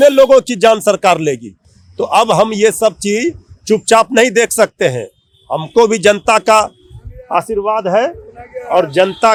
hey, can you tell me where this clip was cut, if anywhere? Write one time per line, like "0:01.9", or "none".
none

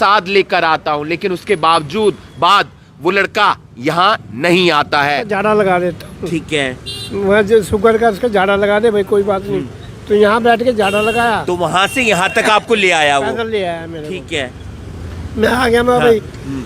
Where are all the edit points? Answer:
0:05.3

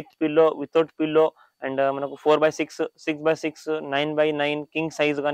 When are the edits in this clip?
none

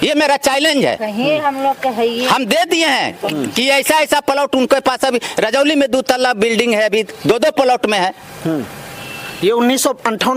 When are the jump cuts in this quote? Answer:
none

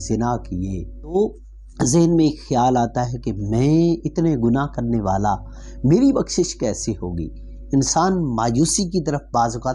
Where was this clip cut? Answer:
none

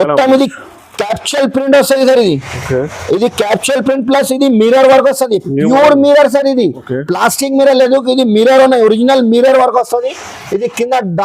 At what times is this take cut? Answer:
none

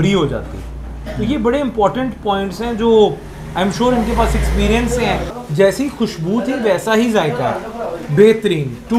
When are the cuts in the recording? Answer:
0:05.4

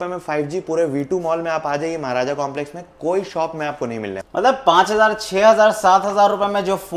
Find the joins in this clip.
0:04.2

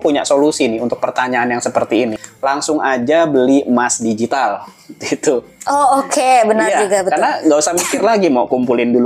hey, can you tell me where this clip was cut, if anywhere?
0:02.1

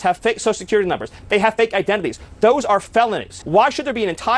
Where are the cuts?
0:03.3

